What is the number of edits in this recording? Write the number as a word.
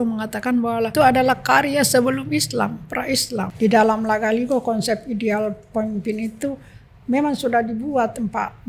two